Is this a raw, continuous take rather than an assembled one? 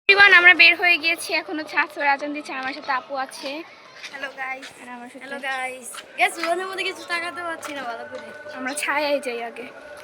yes; 0 cuts

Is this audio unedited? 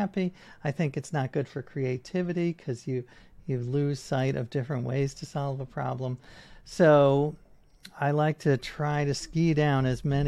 yes; 0 cuts

